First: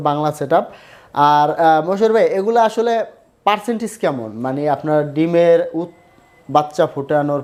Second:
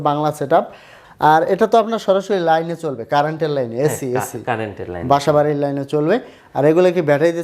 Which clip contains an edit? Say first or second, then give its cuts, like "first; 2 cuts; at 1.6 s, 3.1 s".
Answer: second; 1 cut; at 1.0 s